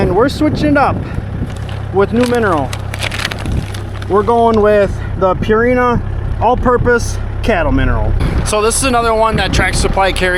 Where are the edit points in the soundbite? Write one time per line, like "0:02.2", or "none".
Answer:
none